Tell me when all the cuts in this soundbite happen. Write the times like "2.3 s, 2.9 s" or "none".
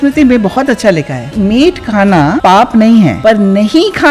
1.3 s, 2.4 s, 3.2 s